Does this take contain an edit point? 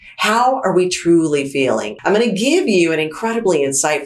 yes; 1 cut; at 1.9 s

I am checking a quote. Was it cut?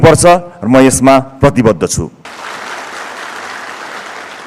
yes; 1 cut; at 2.3 s

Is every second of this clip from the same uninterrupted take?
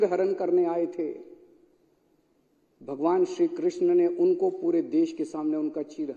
yes; 0 cuts

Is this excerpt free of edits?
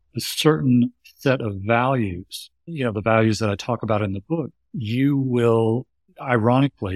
no; 1 cut; at 4.6 s

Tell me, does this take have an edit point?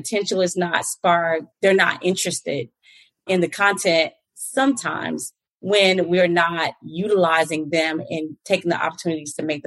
yes; 1 cut; at 1.5 s

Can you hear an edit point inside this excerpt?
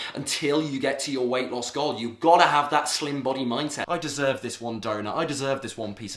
yes; 1 cut; at 3.8 s

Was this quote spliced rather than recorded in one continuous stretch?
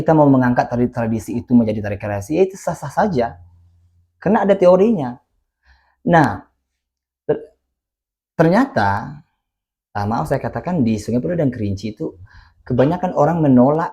no; 0 cuts

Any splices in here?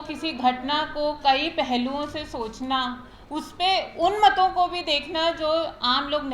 no; 0 cuts

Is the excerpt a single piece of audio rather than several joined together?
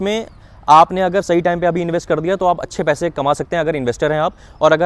yes; 0 cuts

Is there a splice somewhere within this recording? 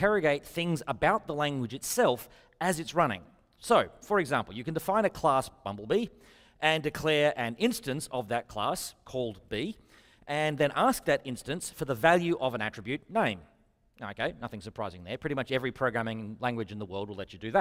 no; 0 cuts

